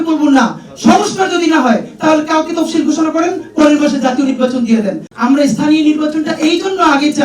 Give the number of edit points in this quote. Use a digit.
1